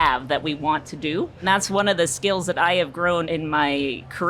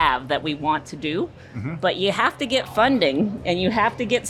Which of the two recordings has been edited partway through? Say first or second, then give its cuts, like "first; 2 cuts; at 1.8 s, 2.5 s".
first; 2 cuts; at 1.4 s, 3.3 s